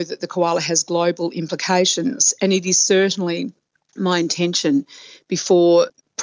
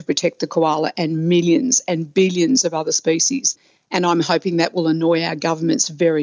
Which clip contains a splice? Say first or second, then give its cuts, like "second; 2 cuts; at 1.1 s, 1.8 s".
second; 1 cut; at 3.5 s